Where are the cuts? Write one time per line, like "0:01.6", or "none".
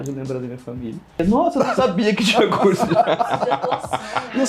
0:01.2